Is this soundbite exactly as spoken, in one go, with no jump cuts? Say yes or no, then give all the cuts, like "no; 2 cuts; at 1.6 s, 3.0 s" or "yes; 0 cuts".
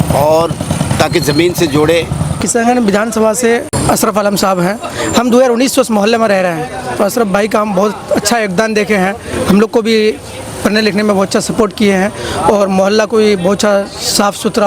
no; 2 cuts; at 2.4 s, 3.7 s